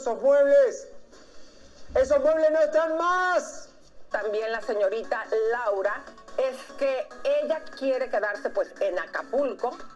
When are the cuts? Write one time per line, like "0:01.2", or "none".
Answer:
0:04.1